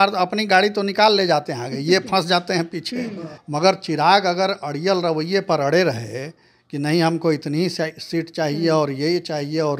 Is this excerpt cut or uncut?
cut